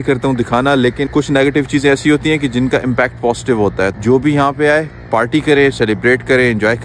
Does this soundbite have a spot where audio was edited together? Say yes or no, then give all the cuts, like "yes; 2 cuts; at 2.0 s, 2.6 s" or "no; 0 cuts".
yes; 2 cuts; at 1.0 s, 4.0 s